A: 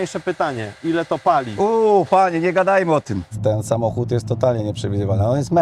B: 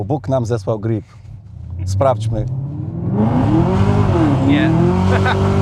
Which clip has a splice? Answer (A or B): A